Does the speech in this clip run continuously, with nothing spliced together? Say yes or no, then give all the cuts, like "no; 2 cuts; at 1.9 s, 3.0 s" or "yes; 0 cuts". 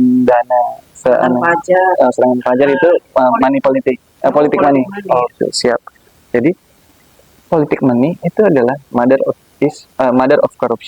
yes; 0 cuts